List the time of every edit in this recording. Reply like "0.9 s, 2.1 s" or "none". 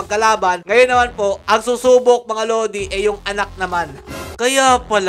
4.2 s